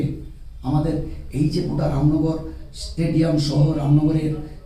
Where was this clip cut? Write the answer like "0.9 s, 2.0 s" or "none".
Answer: none